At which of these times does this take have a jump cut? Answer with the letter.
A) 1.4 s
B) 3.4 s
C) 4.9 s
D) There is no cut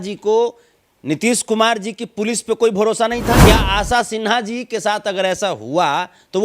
B